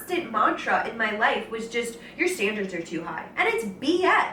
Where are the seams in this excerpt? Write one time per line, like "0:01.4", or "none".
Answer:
0:03.2

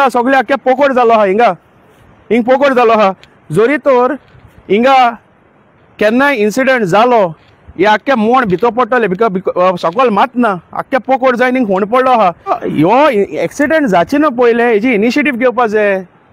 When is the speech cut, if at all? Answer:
0:12.5

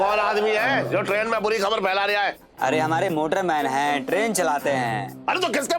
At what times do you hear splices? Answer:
0:02.4

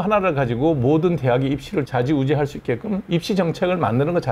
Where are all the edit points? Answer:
none

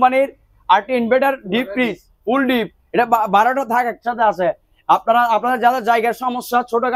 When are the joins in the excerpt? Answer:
none

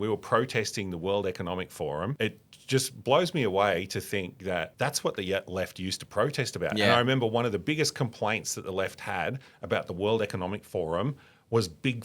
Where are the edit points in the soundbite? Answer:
0:02.2
0:04.7

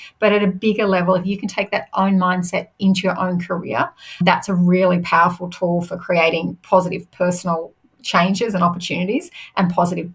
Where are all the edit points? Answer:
none

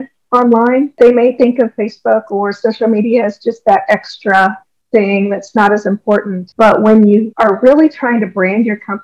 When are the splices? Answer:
0:00.9
0:06.4
0:07.3

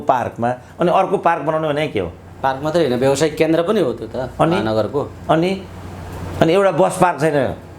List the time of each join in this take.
none

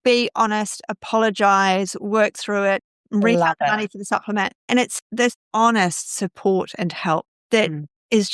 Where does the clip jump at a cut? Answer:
0:05.4

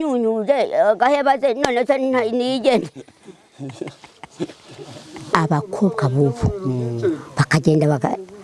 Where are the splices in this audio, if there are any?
0:05.3

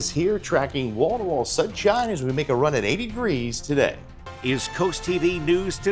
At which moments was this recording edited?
0:04.3

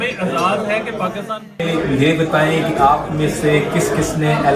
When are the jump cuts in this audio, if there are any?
0:01.6

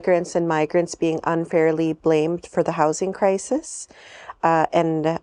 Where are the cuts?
none

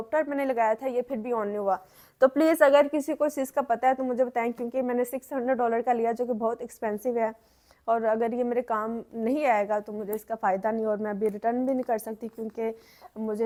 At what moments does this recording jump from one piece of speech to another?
none

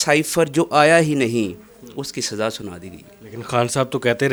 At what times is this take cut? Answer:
none

